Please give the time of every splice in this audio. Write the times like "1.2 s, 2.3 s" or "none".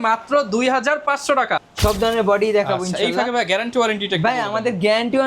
1.6 s